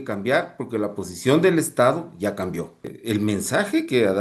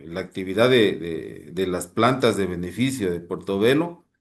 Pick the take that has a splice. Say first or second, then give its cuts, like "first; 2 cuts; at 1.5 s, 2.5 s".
first; 1 cut; at 2.9 s